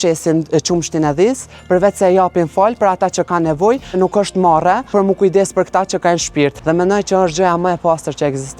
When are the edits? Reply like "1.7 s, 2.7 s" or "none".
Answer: 4.0 s, 4.9 s, 6.6 s

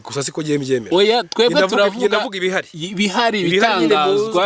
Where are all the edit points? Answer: none

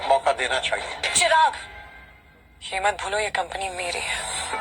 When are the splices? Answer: 1.0 s

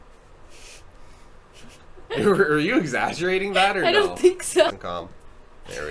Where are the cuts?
4.7 s

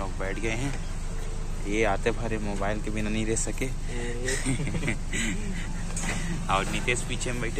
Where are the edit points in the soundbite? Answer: none

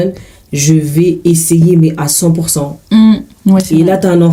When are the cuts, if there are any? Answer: none

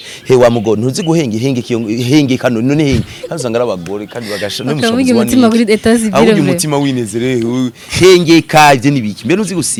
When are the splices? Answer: none

